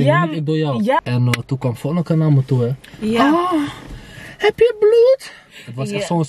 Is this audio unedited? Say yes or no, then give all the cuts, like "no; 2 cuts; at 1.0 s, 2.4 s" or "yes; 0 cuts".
no; 1 cut; at 1.0 s